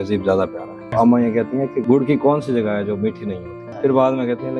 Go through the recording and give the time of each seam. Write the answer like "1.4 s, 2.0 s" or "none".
0.9 s, 1.8 s, 3.7 s